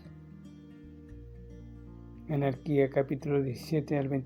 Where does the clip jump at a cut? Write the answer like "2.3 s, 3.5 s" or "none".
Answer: none